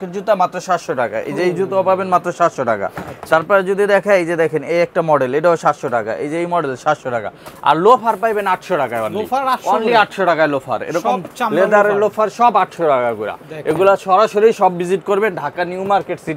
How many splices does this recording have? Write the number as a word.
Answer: zero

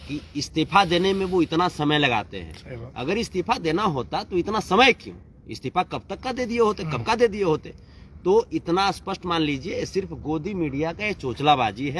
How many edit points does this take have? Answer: zero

